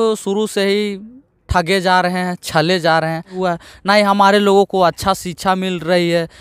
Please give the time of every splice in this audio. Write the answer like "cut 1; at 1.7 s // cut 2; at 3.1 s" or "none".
cut 1; at 3.3 s